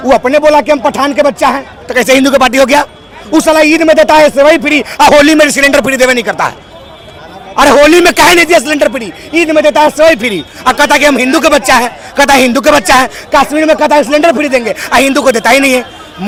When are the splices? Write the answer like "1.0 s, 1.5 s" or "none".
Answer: none